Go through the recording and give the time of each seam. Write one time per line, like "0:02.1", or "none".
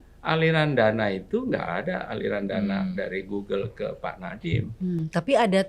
none